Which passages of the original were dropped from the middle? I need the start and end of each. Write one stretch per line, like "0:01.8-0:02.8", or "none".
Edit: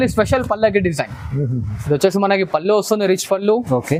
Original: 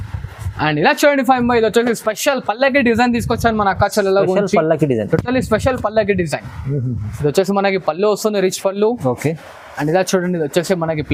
none